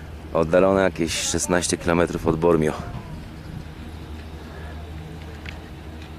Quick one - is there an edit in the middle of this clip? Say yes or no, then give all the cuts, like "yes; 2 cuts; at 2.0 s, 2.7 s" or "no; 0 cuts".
no; 0 cuts